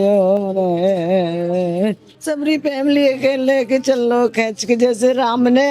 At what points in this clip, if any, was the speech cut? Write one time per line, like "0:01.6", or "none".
0:02.1

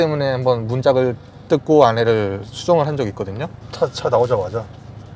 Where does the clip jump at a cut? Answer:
none

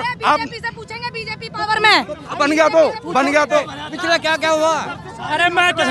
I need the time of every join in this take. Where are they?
0:03.5

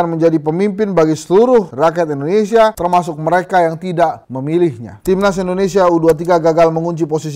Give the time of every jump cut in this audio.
0:05.0

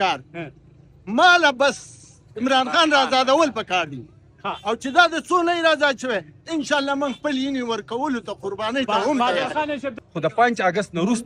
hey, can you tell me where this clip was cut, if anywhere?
0:09.9

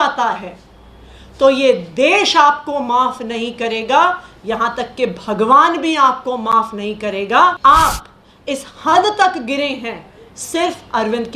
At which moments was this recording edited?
0:07.6

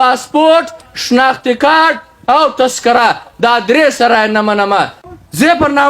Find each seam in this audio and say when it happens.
0:05.0

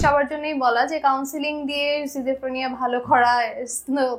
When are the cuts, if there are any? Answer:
none

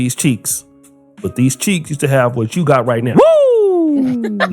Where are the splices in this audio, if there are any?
none

